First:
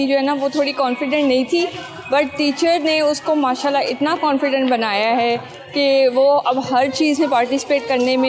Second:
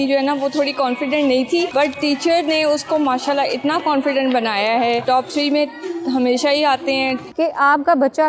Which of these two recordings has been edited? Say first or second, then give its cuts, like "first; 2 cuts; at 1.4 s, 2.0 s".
second; 3 cuts; at 1.7 s, 5.0 s, 7.3 s